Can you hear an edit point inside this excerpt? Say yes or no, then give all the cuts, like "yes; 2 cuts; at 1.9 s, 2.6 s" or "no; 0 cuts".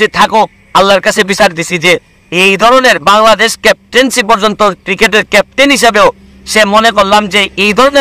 no; 0 cuts